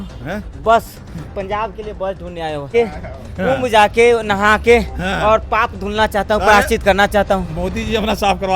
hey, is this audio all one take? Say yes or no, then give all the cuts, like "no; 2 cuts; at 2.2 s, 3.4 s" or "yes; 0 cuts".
no; 1 cut; at 2.7 s